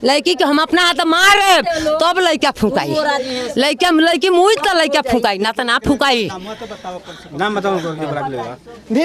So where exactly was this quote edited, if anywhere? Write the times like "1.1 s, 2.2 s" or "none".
none